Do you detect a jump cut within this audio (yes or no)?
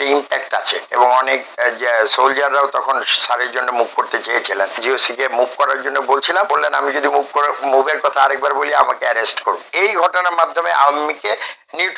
yes